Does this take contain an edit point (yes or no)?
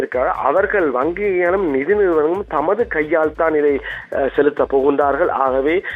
no